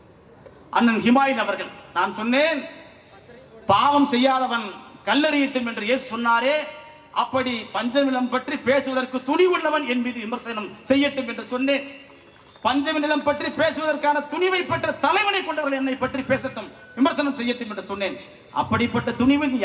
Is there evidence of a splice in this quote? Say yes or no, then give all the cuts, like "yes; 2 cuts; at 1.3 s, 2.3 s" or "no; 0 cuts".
no; 0 cuts